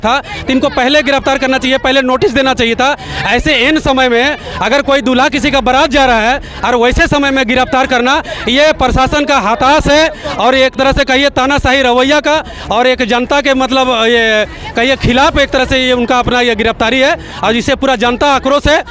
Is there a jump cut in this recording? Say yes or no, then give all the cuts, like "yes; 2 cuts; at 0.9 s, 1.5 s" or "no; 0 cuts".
no; 0 cuts